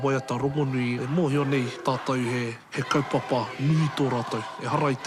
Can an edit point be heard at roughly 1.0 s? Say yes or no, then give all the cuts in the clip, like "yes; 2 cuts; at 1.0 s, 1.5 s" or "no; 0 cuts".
yes; 3 cuts; at 1.0 s, 1.7 s, 2.7 s